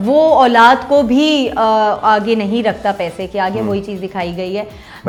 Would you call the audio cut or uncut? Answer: uncut